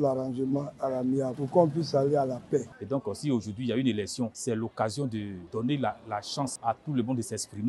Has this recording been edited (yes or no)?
yes